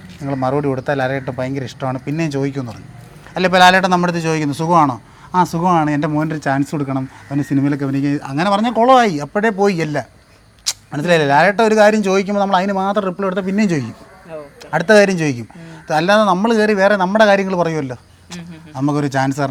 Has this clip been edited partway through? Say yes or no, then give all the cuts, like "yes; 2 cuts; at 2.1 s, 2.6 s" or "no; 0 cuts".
no; 0 cuts